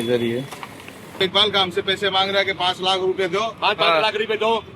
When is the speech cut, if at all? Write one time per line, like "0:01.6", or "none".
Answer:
0:01.1